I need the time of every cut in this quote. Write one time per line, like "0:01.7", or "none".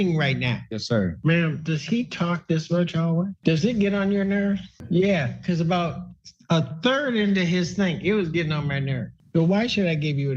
0:01.0
0:03.3
0:09.0